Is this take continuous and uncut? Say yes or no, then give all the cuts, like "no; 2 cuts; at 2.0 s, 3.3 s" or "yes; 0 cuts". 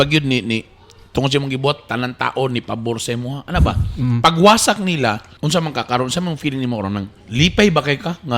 no; 2 cuts; at 5.3 s, 7.2 s